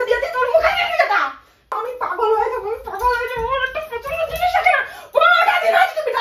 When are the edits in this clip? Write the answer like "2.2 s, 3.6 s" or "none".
1.8 s